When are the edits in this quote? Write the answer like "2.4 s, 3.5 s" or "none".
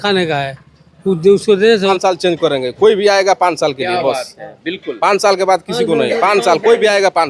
1.9 s